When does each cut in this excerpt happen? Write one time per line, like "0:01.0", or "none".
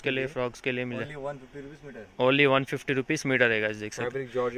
none